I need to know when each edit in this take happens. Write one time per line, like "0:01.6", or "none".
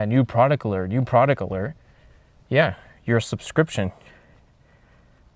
none